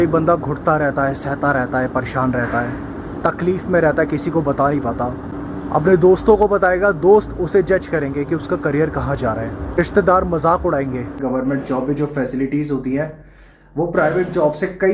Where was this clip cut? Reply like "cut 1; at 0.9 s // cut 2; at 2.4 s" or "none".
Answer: cut 1; at 5.3 s // cut 2; at 9.8 s // cut 3; at 11.2 s